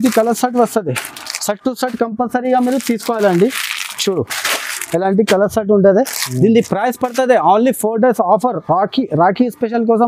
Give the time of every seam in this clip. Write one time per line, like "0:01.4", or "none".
none